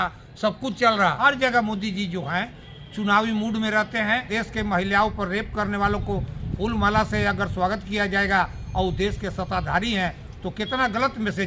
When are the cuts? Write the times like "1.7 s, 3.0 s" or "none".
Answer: 1.2 s, 4.3 s

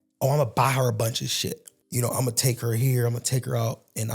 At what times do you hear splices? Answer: 1.7 s

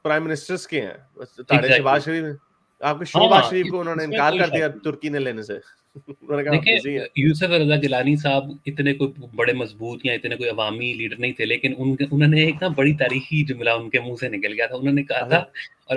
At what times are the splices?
none

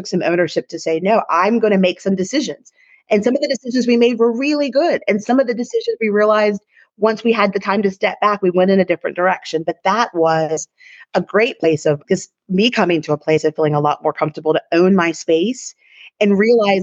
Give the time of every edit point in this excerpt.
12.0 s

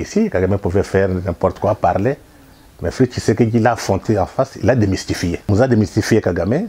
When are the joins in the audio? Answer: 5.4 s

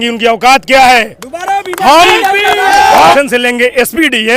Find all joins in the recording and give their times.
3.1 s

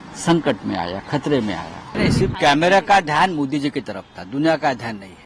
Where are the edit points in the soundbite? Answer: 2.0 s

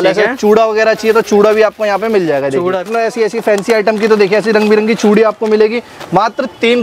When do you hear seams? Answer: 2.9 s

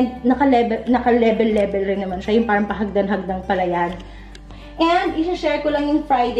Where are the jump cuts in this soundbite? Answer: 4.4 s

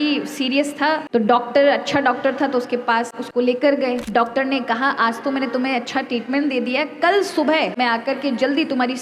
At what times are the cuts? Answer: 1.0 s, 3.2 s, 4.0 s, 7.7 s

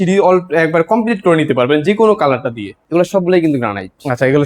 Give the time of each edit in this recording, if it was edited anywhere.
2.8 s

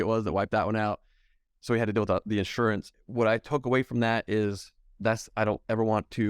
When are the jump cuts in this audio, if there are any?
2.9 s

